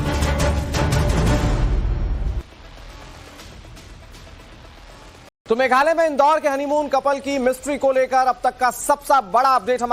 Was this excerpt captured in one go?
yes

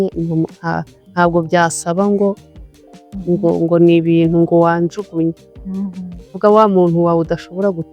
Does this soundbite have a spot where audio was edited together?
no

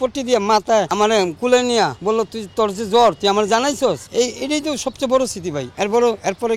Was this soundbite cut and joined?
yes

